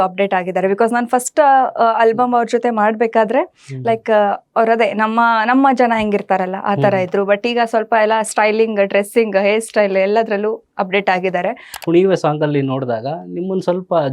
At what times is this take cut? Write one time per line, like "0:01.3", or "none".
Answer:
0:11.8